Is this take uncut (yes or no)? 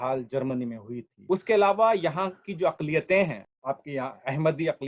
yes